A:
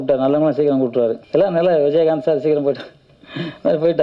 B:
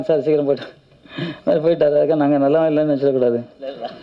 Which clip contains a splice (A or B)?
A